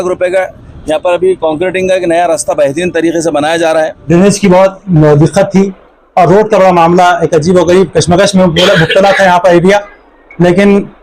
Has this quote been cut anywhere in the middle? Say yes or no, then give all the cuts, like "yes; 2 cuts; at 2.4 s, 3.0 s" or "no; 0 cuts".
yes; 1 cut; at 4.0 s